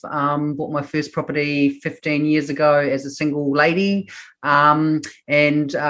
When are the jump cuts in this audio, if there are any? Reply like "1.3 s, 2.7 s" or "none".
none